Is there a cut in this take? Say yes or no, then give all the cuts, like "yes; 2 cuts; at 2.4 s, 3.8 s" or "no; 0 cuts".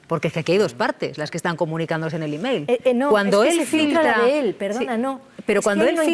no; 0 cuts